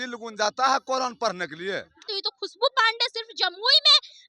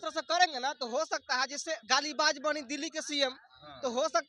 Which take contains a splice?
first; 1 cut; at 2.0 s

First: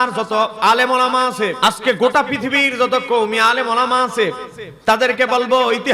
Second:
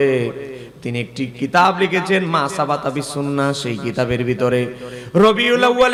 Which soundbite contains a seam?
first; 1 cut; at 1.6 s

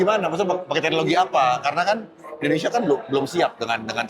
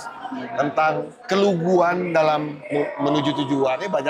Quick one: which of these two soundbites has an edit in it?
second; 1 cut; at 1.1 s

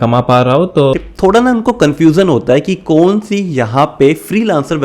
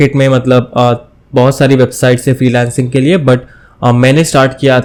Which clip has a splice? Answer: first; 1 cut; at 0.9 s

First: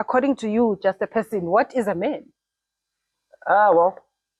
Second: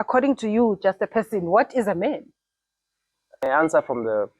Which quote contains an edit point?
second; 1 cut; at 3.5 s

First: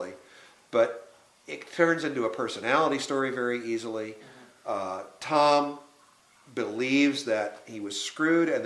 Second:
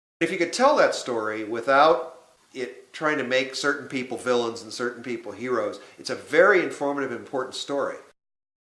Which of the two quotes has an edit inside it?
second; 1 cut; at 6.8 s

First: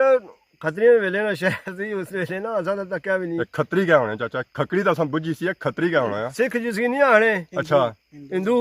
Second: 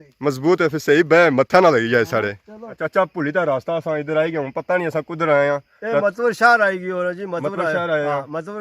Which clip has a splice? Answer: second; 1 cut; at 2.8 s

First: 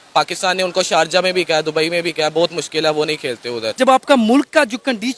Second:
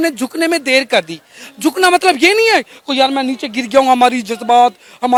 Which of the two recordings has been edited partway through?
first; 1 cut; at 3.7 s

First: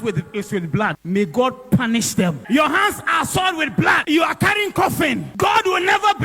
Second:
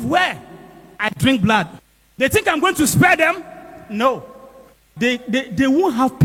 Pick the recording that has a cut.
first; 4 cuts; at 1.0 s, 2.4 s, 4.0 s, 5.3 s

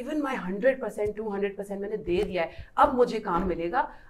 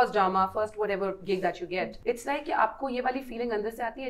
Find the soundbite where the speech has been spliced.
second; 1 cut; at 1.9 s

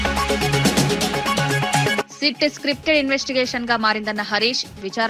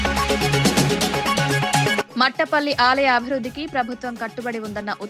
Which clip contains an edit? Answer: second; 1 cut; at 2.1 s

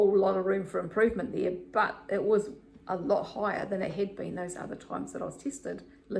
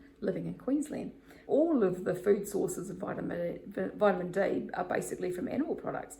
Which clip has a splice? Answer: second; 1 cut; at 1.3 s

